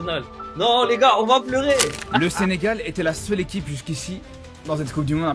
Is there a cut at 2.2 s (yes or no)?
yes